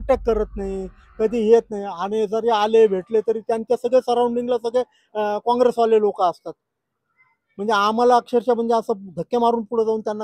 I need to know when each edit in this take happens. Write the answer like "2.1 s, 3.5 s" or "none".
none